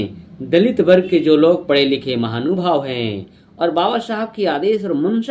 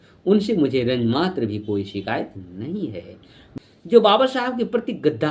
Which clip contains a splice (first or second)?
second